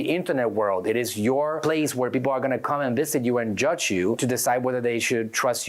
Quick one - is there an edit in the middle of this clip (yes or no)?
yes